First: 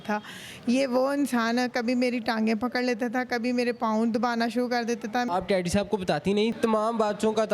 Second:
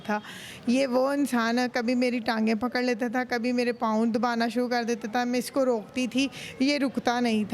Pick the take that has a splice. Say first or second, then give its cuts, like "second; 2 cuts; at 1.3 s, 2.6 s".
first; 2 cuts; at 5.3 s, 6.6 s